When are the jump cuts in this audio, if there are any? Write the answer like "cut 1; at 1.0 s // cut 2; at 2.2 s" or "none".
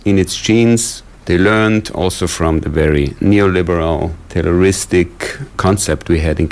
none